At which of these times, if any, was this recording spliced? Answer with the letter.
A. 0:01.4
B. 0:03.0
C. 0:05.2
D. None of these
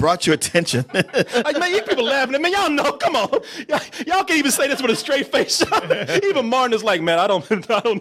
D